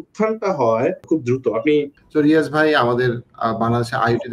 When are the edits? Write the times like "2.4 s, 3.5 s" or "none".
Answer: 1.0 s, 2.0 s